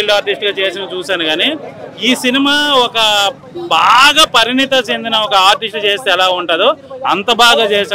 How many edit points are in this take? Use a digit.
0